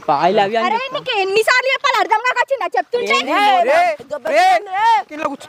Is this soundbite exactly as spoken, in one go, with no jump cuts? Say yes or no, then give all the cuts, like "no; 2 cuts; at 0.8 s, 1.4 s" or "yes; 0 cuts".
yes; 0 cuts